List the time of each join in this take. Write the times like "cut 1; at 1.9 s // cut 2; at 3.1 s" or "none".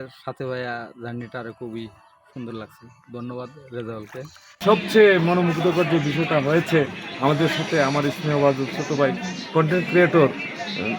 cut 1; at 4.5 s